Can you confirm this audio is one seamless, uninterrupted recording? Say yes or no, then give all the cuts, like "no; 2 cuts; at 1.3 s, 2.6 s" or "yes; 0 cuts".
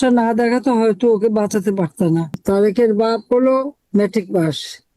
no; 1 cut; at 2.4 s